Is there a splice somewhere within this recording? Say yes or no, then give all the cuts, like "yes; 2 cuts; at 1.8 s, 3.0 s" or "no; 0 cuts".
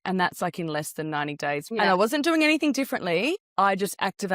yes; 2 cuts; at 1.7 s, 3.4 s